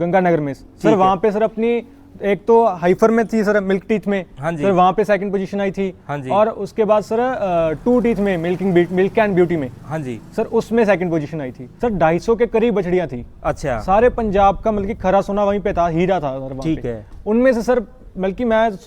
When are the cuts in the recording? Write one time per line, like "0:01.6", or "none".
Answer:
0:11.6